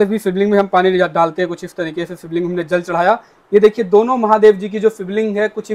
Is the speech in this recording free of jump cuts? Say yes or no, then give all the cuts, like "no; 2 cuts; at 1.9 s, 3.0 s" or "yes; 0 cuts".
yes; 0 cuts